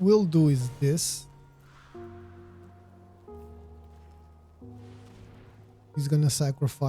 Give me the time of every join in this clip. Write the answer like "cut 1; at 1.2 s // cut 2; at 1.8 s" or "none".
cut 1; at 1.0 s // cut 2; at 4.1 s // cut 3; at 5.3 s